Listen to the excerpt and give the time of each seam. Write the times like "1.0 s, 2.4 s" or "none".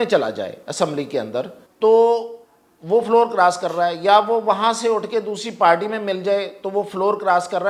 1.6 s